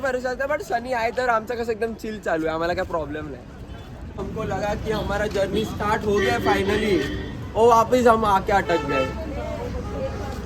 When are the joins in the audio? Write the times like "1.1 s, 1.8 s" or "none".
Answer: none